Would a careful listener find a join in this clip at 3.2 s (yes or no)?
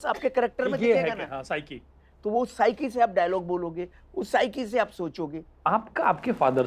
no